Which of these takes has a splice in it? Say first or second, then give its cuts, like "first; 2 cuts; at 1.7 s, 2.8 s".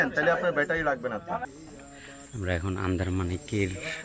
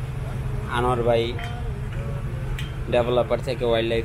first; 1 cut; at 1.7 s